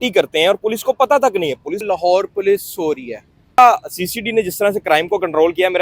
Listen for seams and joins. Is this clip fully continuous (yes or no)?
no